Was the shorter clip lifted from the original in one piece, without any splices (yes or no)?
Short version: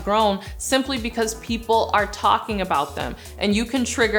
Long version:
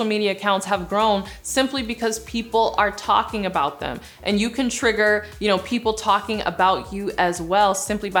yes